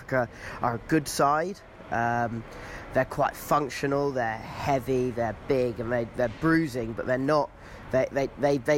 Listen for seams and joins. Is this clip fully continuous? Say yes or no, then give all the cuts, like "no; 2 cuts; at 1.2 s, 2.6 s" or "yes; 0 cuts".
yes; 0 cuts